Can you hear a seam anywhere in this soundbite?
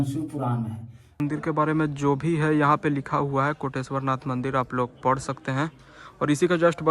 yes; 1 cut; at 1.2 s

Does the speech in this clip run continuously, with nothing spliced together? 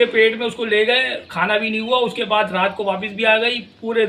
yes; 0 cuts

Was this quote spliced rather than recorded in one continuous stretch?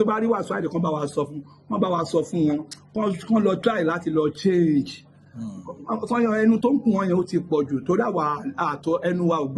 no; 0 cuts

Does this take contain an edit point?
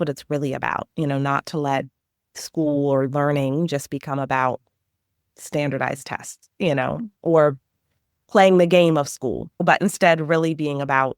yes; 1 cut; at 9.6 s

